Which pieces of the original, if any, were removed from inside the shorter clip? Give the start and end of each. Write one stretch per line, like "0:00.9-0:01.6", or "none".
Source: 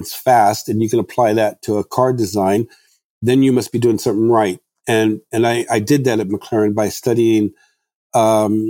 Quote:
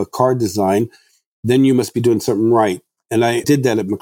0:04.9-0:05.5